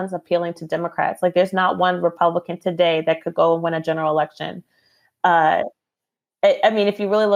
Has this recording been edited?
no; 0 cuts

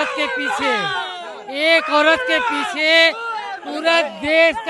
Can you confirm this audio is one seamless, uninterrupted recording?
yes; 0 cuts

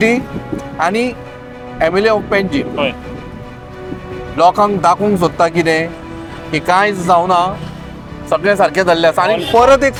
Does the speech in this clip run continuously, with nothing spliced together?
yes; 0 cuts

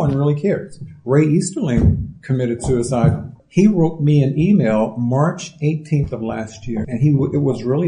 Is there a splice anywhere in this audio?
yes; 2 cuts; at 3.4 s, 6.8 s

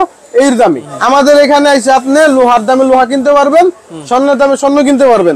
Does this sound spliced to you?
yes; 1 cut; at 0.9 s

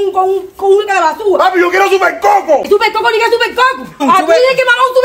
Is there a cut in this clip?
yes; 2 cuts; at 2.6 s, 4.0 s

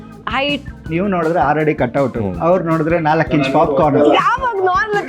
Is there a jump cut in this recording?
yes; 1 cut; at 0.9 s

